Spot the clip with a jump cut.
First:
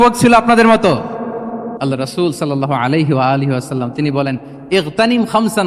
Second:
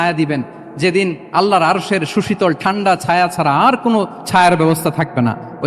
first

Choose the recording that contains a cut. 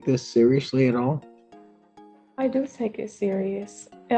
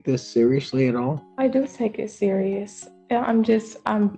second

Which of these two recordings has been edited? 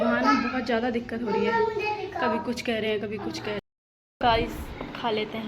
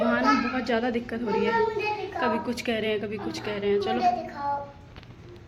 first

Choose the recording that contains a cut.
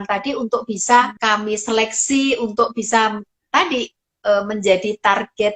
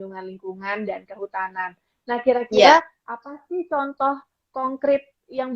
first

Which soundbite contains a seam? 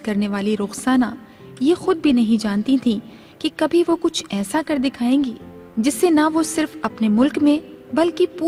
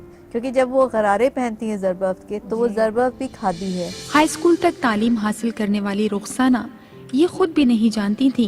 second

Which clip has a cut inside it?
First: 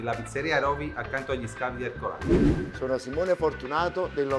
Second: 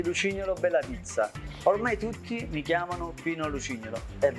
first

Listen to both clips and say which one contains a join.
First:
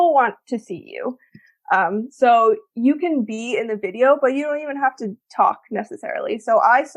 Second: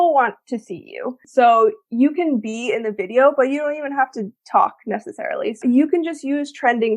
second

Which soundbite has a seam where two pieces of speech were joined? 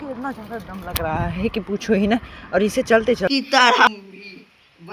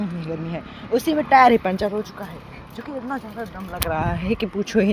first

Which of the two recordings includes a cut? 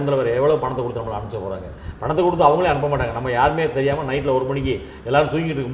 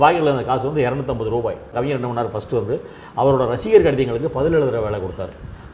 second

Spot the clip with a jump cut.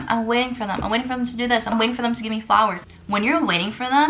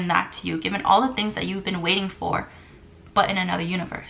first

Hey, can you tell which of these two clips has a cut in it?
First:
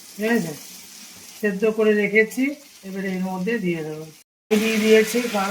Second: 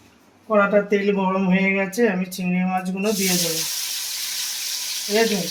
first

